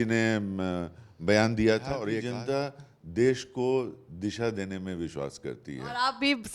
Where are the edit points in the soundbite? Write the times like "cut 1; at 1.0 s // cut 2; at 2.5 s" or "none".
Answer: cut 1; at 2.1 s